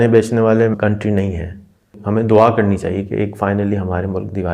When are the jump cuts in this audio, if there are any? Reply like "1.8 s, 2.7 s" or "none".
0.7 s, 1.9 s